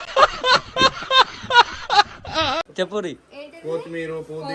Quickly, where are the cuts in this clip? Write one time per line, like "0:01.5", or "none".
0:02.6